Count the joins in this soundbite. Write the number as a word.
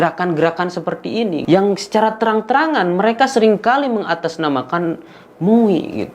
one